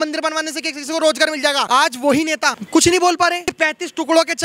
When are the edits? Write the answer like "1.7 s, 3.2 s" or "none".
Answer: 1.7 s, 3.5 s